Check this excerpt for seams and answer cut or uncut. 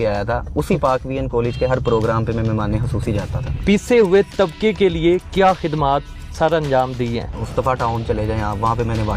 cut